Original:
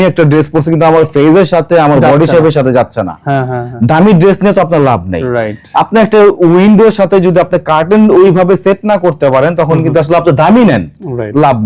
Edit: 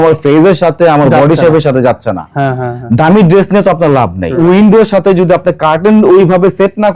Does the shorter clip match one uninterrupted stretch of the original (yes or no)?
no